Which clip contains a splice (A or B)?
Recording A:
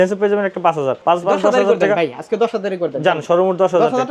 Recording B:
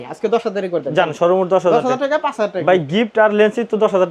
A